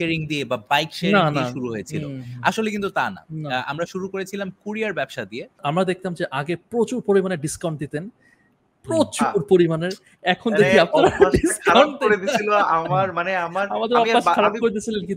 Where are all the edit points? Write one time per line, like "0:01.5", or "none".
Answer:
0:05.6